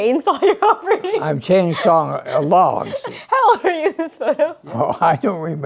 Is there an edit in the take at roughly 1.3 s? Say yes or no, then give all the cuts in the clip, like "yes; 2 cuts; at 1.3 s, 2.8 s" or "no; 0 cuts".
no; 1 cut; at 2.9 s